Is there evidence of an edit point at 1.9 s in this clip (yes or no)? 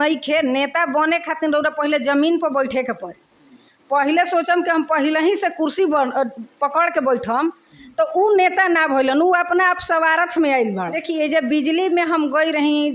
no